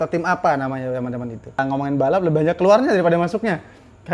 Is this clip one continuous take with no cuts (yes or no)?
no